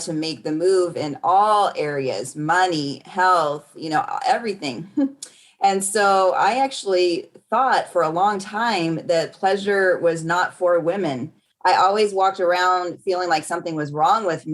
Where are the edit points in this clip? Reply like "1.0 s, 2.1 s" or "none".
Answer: 11.4 s